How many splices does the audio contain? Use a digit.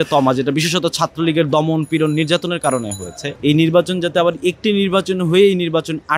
1